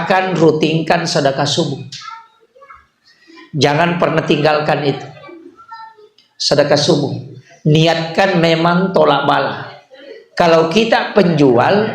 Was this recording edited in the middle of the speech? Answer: no; 0 cuts

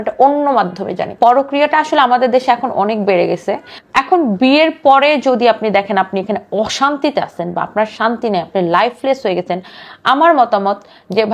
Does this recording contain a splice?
yes; 2 cuts; at 1.1 s, 3.7 s

